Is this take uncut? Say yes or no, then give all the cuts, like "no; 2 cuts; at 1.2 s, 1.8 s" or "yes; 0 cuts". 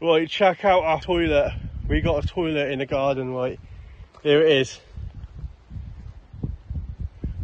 no; 1 cut; at 1.0 s